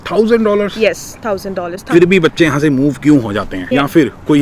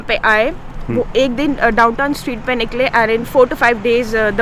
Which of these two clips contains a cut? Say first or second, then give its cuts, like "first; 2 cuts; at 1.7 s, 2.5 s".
first; 2 cuts; at 1.7 s, 3.7 s